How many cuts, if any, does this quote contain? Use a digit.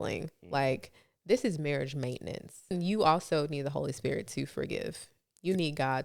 1